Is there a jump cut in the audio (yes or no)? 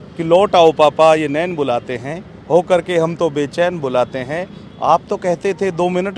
no